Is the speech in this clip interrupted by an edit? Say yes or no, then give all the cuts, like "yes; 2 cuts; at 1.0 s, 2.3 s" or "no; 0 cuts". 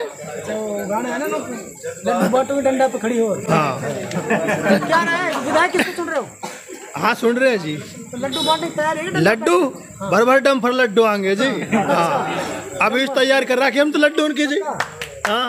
no; 0 cuts